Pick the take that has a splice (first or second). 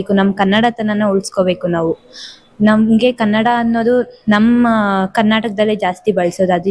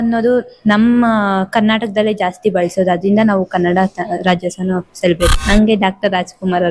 second